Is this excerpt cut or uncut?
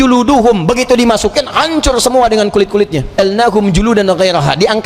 cut